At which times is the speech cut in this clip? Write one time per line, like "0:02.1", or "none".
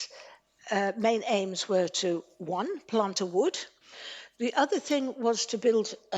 0:03.7